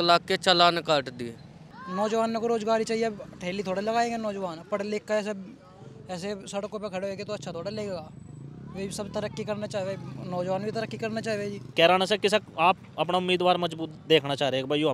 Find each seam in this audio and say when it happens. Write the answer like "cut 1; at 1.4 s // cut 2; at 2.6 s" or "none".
cut 1; at 1.6 s // cut 2; at 11.6 s